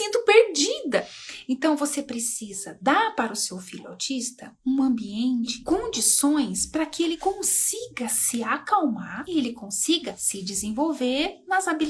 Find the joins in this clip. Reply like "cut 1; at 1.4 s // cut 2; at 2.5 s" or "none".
cut 1; at 1.1 s